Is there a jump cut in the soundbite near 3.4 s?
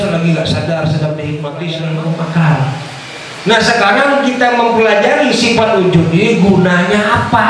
no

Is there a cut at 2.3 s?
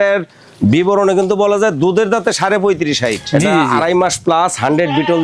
no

